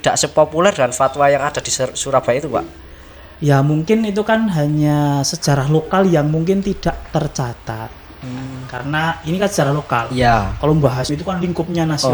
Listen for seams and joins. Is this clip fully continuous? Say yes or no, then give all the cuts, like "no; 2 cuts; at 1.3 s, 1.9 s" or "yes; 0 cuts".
yes; 0 cuts